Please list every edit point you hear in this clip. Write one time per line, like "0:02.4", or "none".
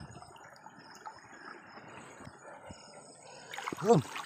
0:02.2